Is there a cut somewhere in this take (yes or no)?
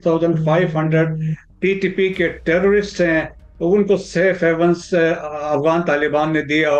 no